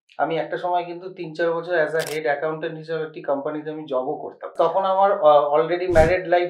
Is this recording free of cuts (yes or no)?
no